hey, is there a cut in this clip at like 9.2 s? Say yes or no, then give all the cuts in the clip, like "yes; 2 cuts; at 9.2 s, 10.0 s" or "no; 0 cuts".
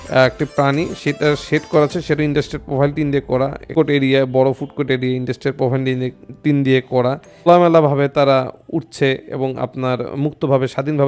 no; 2 cuts; at 3.7 s, 7.5 s